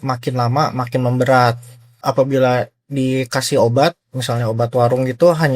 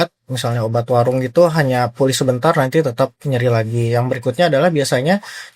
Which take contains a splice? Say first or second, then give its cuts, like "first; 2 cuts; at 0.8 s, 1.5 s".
first; 1 cut; at 1.9 s